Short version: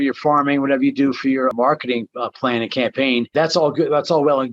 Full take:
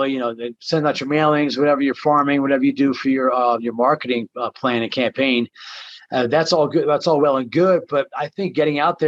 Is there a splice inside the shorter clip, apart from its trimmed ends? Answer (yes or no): yes